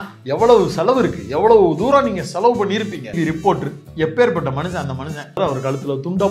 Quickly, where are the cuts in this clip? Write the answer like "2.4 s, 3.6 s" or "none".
3.1 s, 5.4 s